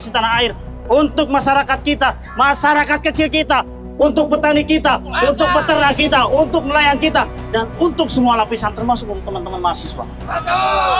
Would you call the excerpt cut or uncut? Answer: uncut